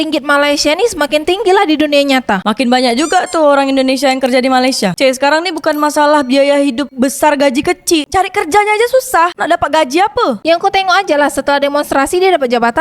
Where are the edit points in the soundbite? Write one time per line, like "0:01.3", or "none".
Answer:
0:04.9
0:10.4